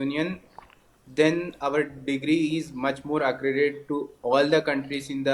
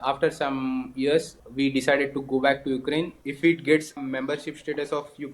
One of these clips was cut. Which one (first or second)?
second